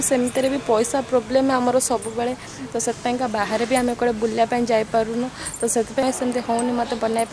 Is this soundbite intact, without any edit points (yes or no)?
no